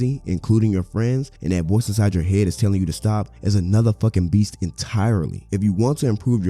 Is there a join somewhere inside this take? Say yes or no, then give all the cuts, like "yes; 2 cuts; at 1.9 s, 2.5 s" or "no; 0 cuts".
yes; 3 cuts; at 1.3 s, 3.3 s, 5.4 s